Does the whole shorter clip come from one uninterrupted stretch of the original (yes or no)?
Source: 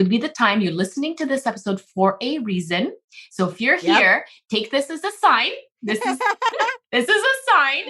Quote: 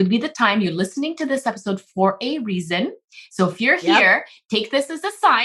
yes